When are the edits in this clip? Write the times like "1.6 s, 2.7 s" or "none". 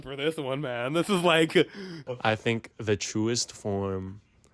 2.1 s